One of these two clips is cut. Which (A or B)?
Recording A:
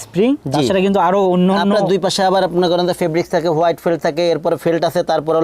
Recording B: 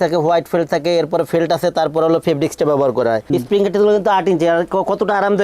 B